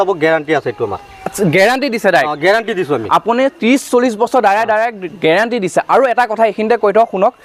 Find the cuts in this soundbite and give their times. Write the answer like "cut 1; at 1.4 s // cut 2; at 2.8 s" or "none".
none